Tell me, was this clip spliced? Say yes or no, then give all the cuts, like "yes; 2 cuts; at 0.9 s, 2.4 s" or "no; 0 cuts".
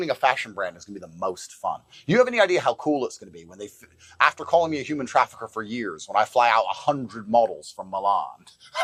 no; 0 cuts